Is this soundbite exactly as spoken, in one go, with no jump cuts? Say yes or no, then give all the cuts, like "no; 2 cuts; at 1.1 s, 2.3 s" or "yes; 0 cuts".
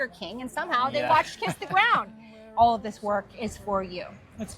no; 1 cut; at 2.4 s